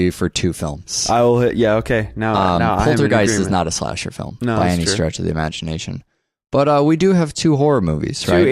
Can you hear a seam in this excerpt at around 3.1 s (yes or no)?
yes